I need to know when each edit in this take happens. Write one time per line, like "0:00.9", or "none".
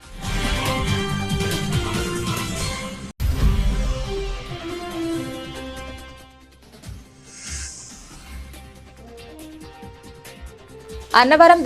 0:03.0